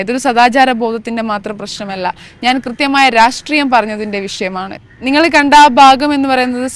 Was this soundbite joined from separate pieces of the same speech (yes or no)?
yes